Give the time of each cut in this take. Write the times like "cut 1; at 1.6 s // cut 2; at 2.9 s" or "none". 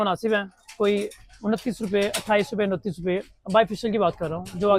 none